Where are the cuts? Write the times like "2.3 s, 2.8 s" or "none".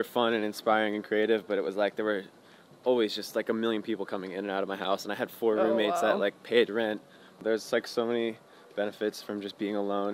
7.4 s